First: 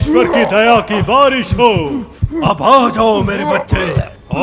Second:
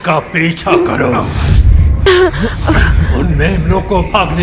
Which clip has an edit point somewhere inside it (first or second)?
second